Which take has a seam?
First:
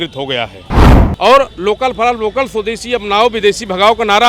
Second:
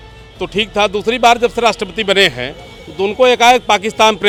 first; 1 cut; at 1.0 s

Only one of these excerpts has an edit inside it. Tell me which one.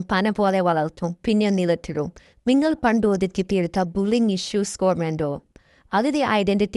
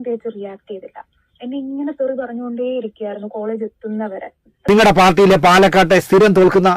second; 1 cut; at 4.7 s

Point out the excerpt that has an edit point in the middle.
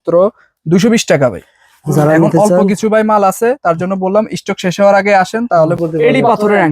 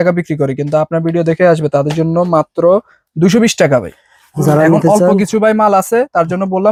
first; 1 cut; at 5.8 s

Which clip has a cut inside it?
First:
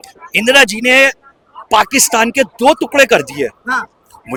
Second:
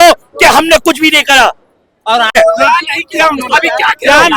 second; 1 cut; at 2.3 s

